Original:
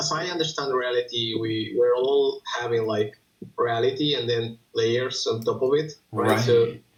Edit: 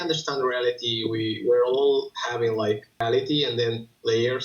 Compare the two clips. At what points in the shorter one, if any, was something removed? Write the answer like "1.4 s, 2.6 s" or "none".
3.0 s

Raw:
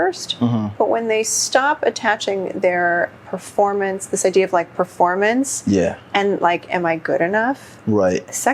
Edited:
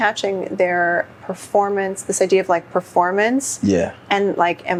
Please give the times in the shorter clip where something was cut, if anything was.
none

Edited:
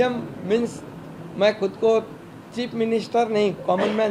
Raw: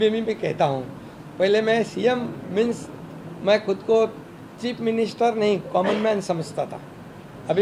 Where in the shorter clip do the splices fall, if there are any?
none

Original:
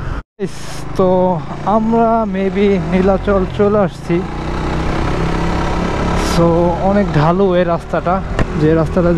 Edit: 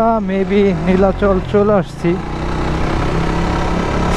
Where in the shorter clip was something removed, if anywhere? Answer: none

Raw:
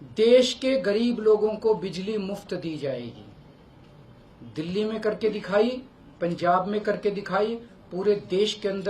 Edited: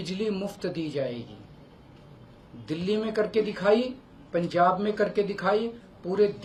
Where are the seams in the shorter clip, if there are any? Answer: none

